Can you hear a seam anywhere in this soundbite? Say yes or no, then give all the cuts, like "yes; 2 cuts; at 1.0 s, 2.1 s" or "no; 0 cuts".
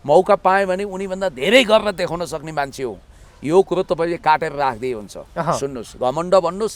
no; 0 cuts